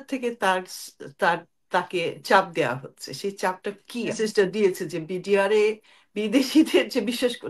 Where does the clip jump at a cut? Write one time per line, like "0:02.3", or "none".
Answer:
0:04.2